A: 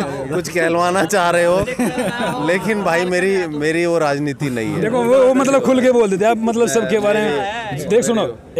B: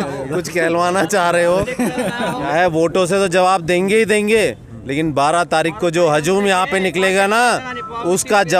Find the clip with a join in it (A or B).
B